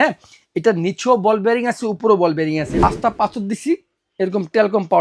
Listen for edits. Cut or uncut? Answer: cut